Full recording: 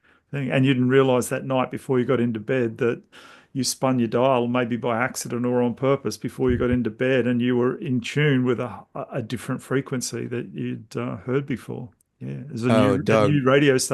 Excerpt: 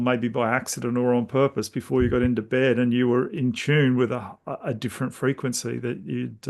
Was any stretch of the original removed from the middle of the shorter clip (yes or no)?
no